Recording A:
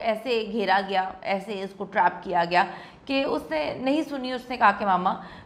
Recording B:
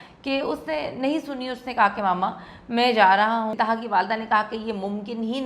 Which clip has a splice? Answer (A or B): B